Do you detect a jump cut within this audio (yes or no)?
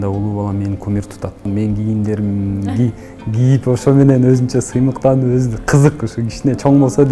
yes